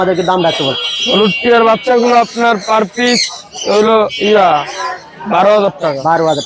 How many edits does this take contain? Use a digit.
0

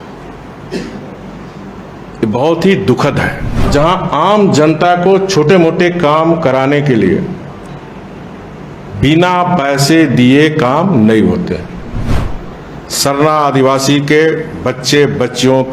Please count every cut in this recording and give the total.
2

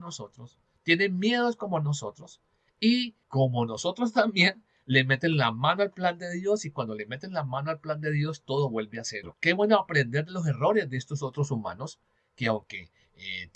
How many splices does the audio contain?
2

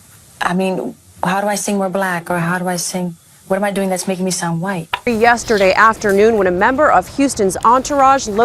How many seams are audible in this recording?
1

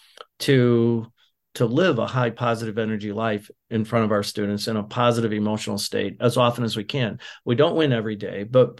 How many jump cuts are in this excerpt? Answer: 2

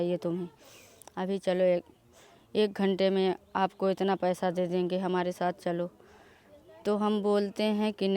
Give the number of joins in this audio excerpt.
0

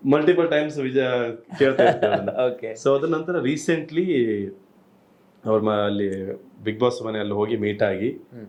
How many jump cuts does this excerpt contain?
0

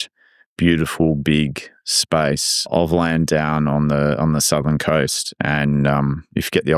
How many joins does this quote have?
1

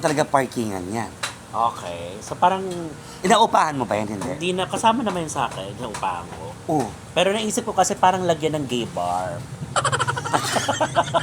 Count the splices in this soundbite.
0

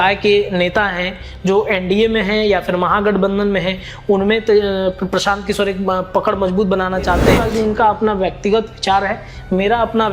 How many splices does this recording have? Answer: 1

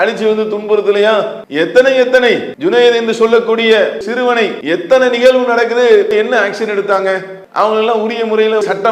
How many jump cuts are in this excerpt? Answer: 4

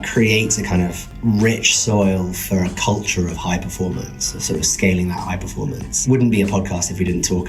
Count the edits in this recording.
2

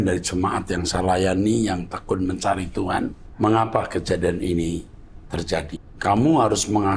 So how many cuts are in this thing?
2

